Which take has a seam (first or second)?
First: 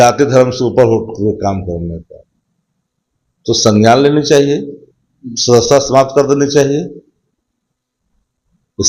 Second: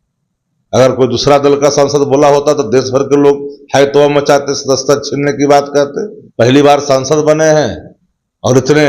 second